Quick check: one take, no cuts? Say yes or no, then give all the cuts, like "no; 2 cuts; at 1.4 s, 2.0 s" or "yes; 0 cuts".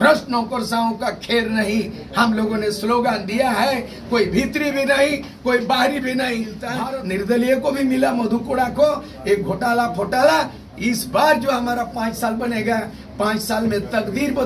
no; 1 cut; at 6.7 s